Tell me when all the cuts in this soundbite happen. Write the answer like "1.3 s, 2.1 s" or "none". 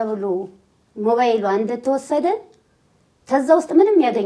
none